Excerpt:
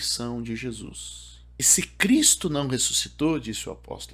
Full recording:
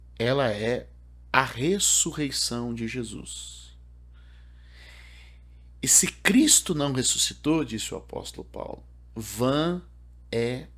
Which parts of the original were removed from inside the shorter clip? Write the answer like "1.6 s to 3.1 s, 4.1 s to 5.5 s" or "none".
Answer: 4.0 s to 5.9 s